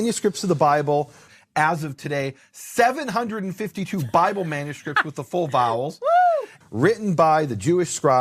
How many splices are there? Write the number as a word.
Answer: one